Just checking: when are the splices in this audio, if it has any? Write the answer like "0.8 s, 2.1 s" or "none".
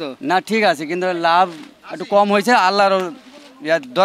none